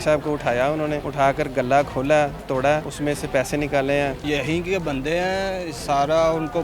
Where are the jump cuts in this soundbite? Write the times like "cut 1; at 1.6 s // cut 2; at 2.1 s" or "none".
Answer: cut 1; at 1.0 s // cut 2; at 2.9 s // cut 3; at 4.2 s